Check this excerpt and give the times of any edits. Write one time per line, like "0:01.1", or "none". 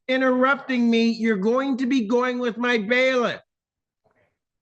none